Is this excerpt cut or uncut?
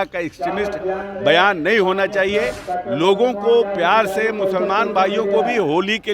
uncut